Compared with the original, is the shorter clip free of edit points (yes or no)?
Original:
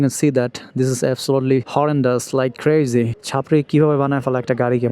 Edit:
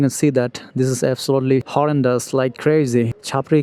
yes